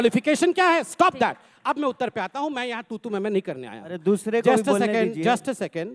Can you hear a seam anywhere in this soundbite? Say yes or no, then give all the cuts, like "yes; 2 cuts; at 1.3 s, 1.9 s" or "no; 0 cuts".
yes; 1 cut; at 1.1 s